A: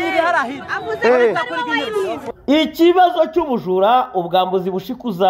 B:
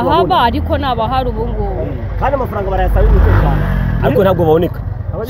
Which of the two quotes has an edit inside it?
A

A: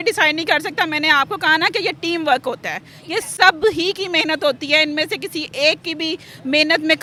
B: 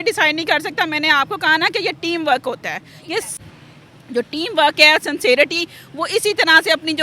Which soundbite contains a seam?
B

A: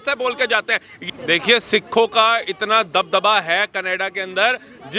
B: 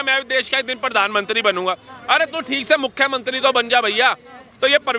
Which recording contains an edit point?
A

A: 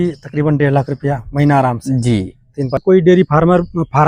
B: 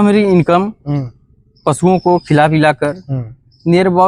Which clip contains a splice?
A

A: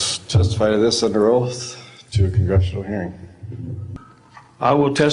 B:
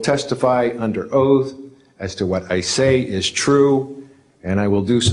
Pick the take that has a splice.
A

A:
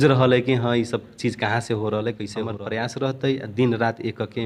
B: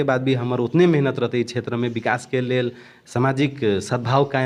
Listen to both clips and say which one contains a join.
A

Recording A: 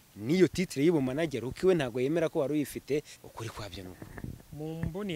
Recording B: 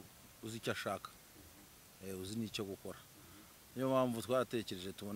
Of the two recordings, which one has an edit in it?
A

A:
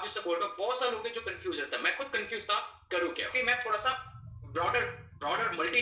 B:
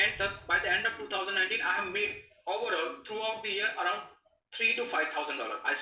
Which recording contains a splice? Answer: A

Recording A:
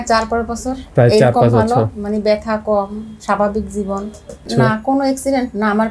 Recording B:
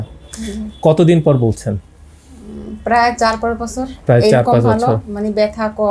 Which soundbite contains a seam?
A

